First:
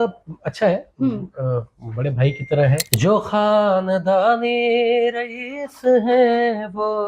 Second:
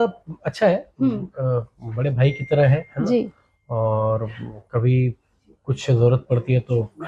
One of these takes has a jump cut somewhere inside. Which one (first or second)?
first